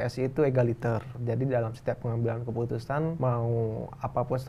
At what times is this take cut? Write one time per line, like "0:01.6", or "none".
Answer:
0:01.2
0:03.2